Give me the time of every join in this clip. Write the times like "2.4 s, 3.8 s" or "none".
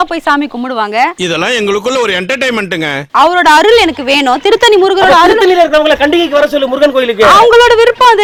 none